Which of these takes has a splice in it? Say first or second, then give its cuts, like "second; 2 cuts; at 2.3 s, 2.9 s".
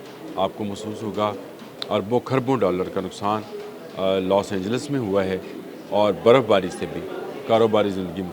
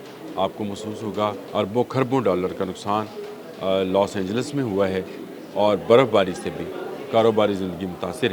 second; 1 cut; at 1.4 s